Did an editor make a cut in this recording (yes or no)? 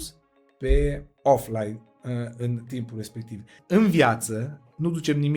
yes